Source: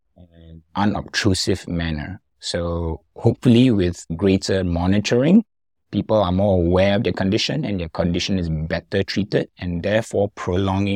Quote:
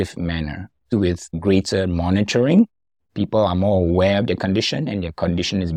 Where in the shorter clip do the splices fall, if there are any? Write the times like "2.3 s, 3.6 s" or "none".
0.9 s